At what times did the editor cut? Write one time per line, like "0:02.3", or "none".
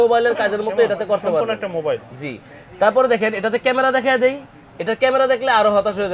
none